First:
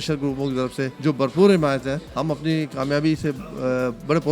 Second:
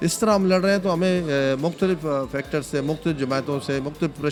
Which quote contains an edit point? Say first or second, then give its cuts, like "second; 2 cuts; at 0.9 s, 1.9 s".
first; 2 cuts; at 0.9 s, 2.1 s